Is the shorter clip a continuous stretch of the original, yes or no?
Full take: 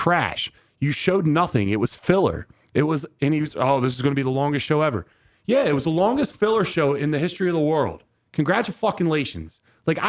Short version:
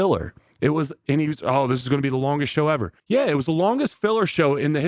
no